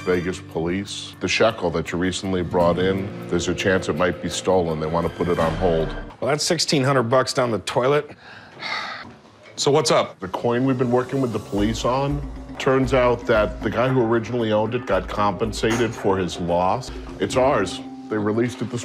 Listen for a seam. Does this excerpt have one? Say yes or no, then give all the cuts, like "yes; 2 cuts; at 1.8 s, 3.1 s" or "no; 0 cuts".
yes; 1 cut; at 9.1 s